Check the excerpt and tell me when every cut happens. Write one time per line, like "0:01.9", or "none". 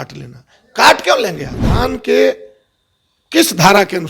0:01.8